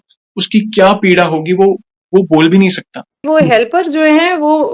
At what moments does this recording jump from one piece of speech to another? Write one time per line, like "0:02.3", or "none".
0:03.2